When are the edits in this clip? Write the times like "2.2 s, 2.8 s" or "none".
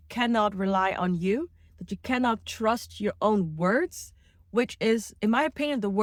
none